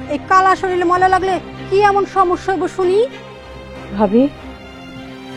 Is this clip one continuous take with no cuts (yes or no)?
yes